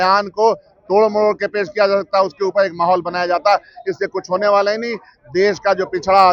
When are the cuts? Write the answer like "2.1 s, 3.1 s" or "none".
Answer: none